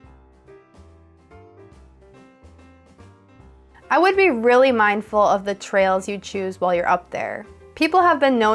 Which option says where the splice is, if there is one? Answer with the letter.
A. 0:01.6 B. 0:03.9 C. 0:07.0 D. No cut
B